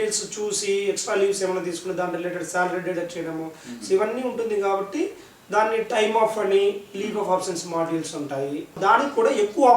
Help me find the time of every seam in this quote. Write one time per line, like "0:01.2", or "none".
0:08.8